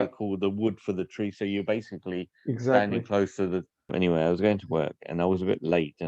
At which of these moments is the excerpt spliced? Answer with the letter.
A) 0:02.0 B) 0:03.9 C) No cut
B